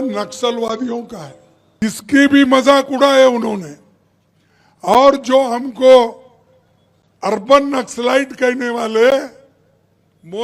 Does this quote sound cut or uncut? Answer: cut